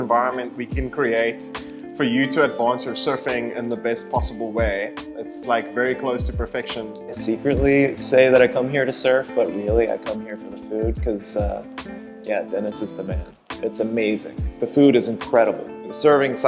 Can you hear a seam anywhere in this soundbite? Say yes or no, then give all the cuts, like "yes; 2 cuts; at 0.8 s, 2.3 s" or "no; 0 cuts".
no; 0 cuts